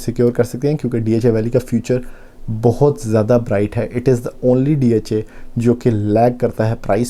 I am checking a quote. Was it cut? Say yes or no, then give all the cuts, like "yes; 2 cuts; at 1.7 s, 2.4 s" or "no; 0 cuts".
no; 0 cuts